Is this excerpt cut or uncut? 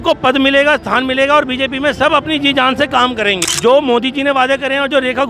cut